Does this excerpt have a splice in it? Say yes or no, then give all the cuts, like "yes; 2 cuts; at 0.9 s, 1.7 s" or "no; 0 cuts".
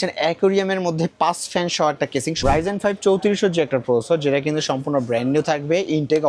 yes; 1 cut; at 2.3 s